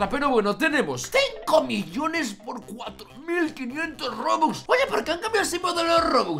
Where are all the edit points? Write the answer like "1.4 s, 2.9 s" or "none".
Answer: 1.1 s